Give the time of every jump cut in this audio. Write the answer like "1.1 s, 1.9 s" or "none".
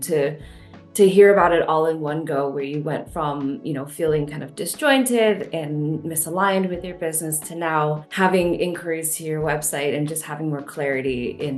none